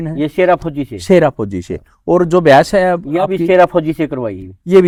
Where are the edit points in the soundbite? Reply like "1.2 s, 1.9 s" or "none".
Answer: none